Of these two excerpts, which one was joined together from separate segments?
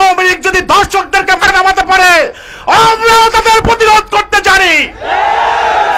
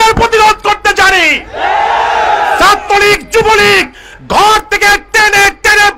first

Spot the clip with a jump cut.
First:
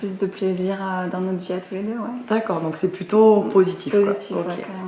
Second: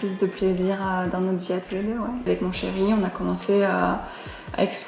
second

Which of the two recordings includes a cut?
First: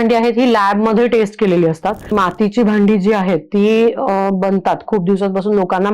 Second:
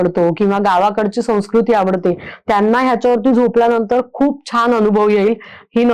first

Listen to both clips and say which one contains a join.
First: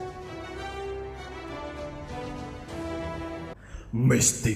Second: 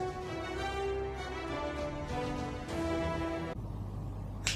second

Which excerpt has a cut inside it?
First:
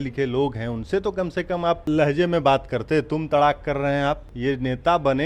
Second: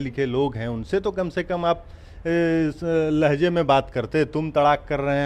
first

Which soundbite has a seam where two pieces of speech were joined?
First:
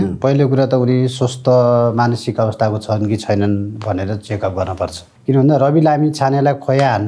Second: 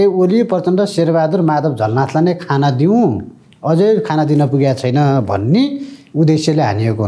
first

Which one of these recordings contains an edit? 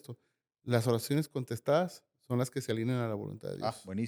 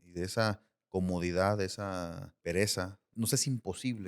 second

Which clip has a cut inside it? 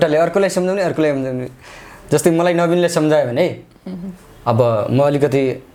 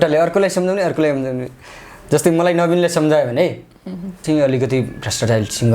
second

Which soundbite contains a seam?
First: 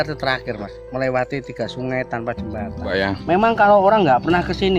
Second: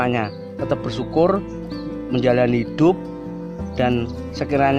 first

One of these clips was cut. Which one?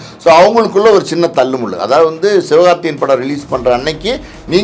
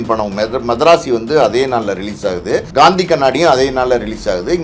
second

